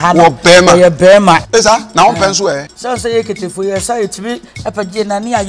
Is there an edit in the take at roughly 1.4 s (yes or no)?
yes